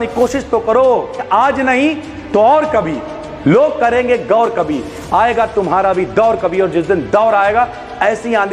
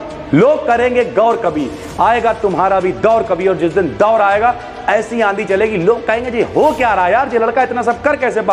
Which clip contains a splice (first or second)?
first